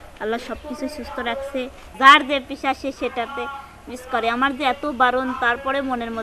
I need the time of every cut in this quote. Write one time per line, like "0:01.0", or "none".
0:01.9